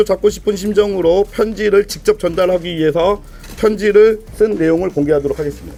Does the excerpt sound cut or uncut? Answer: uncut